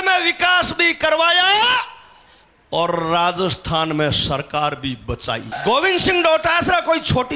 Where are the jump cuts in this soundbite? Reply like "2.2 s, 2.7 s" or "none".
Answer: 5.5 s